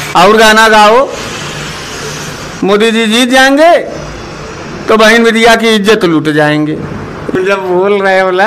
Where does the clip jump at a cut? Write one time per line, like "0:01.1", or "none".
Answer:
0:07.3